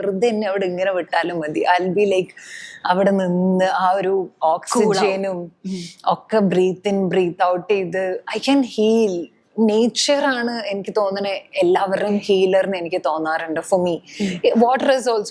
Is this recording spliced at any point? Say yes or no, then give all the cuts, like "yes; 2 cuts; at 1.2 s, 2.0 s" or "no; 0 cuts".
no; 0 cuts